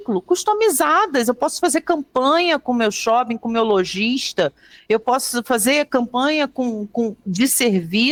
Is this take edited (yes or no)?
no